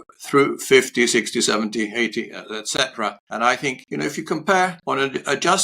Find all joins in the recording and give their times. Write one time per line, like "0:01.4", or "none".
0:03.2
0:03.8
0:04.8